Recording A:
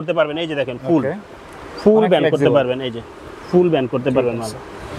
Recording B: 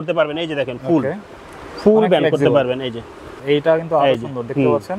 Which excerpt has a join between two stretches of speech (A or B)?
B